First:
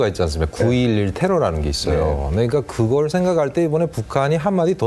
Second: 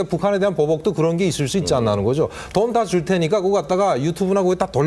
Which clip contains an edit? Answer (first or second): first